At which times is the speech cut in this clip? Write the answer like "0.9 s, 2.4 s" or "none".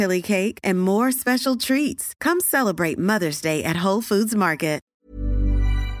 4.9 s

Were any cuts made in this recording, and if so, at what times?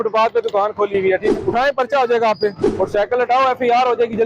1.3 s, 2.6 s

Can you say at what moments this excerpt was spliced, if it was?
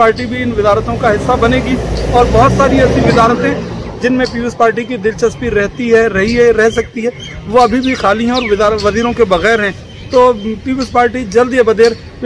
none

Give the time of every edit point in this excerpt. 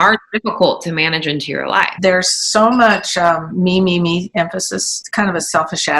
1.9 s, 4.8 s

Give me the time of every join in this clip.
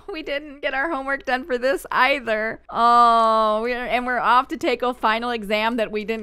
none

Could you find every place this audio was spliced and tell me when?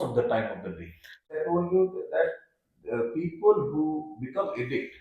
1.3 s

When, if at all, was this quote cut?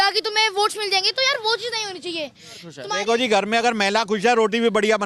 2.8 s

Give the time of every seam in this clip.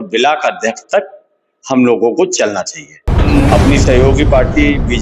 3.3 s

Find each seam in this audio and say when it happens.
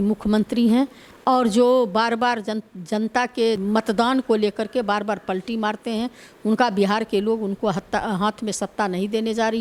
none

